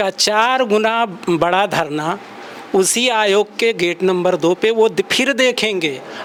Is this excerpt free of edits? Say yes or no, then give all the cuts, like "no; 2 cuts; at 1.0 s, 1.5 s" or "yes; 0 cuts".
yes; 0 cuts